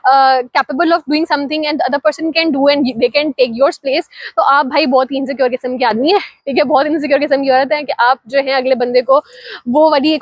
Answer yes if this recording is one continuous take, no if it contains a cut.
yes